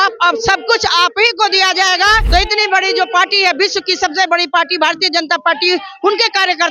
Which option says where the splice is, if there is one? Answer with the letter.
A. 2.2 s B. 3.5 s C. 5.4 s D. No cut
A